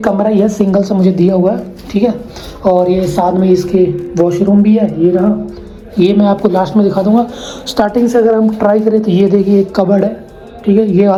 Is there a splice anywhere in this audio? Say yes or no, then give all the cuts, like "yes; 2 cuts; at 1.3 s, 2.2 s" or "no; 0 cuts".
no; 0 cuts